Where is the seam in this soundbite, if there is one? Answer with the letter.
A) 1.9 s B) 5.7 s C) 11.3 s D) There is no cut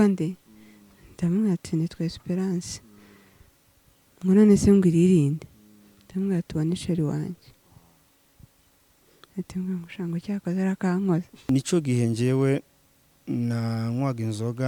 C